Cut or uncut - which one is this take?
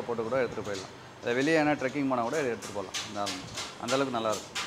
uncut